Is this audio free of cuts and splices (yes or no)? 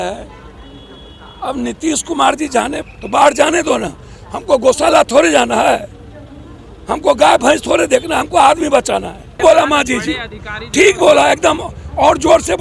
no